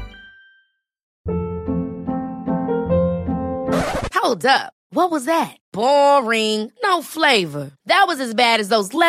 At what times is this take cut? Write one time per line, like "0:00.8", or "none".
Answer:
0:01.0